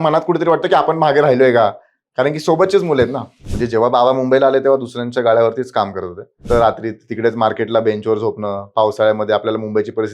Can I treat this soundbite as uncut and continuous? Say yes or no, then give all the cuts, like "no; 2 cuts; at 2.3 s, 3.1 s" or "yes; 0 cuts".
no; 2 cuts; at 3.5 s, 6.4 s